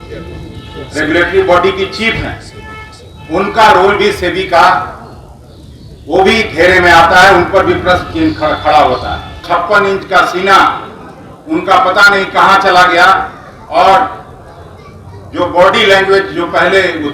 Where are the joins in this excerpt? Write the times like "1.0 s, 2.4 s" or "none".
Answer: 9.4 s